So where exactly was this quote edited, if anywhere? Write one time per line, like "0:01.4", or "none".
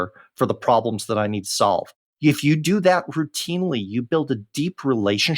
0:02.0